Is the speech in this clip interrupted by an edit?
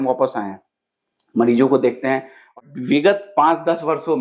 yes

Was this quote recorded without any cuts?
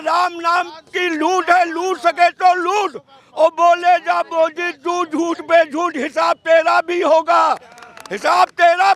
yes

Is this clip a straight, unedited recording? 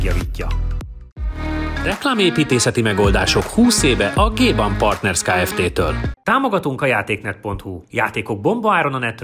no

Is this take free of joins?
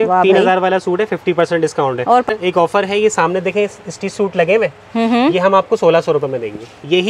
no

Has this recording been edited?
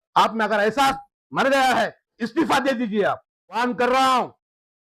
yes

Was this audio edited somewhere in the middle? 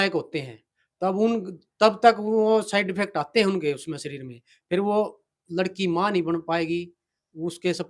no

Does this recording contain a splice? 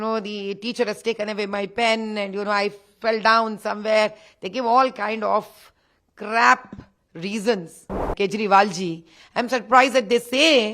yes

